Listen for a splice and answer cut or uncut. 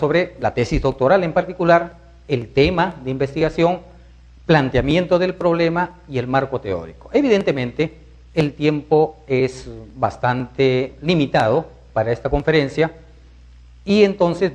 cut